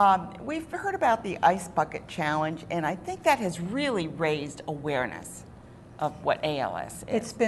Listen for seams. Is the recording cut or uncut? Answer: cut